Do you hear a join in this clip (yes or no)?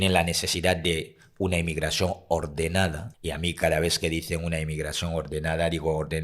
yes